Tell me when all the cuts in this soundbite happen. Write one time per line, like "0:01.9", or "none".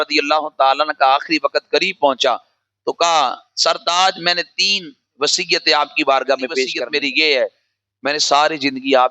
0:06.8